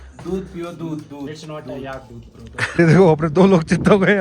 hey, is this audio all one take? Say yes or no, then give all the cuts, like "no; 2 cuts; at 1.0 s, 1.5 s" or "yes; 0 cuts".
no; 1 cut; at 2.7 s